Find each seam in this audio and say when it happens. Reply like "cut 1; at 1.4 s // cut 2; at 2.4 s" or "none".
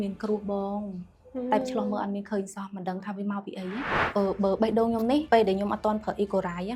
cut 1; at 1.6 s // cut 2; at 3.9 s // cut 3; at 5.2 s